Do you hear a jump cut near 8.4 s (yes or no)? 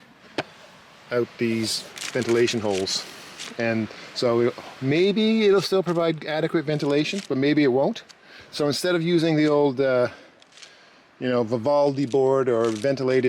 yes